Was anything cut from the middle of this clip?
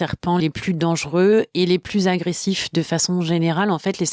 no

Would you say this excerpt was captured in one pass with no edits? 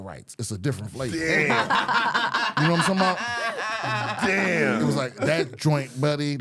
yes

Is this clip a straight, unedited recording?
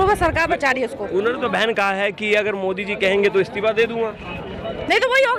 yes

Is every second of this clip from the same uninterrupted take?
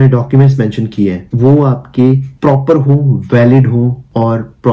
yes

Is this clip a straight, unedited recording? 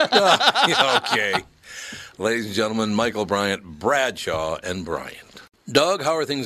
no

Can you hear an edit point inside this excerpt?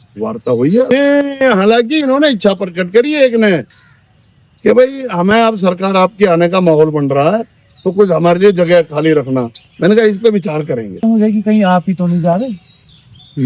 yes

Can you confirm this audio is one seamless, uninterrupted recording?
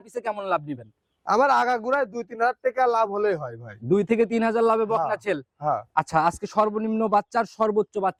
yes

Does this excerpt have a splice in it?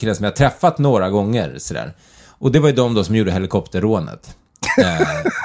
no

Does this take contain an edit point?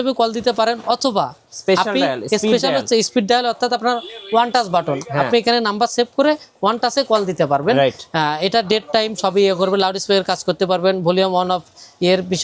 no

